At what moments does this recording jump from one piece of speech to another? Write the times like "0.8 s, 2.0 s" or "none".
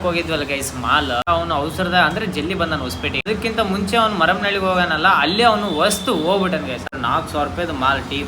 1.3 s, 3.2 s, 6.9 s